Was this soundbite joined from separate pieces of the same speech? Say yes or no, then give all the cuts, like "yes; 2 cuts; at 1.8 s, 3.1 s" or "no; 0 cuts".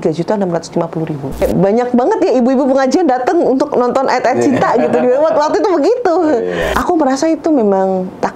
yes; 2 cuts; at 1.4 s, 6.7 s